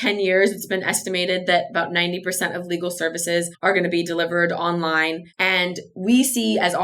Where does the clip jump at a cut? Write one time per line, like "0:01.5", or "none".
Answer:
0:03.5
0:05.3